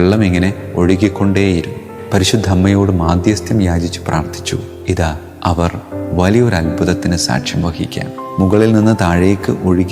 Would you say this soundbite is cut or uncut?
cut